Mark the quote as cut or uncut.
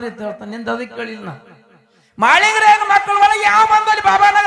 uncut